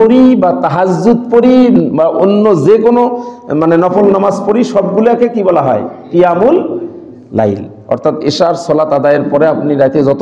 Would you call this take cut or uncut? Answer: uncut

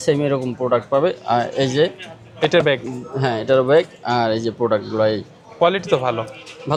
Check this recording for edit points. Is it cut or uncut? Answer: uncut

